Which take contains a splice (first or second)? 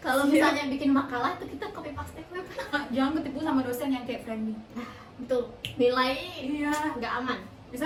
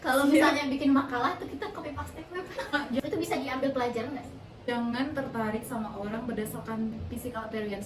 second